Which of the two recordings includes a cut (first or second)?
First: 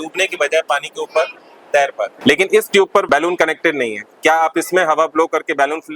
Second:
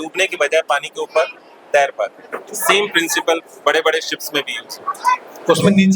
first